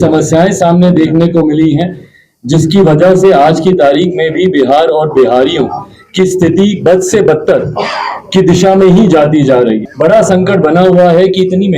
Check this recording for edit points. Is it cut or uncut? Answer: cut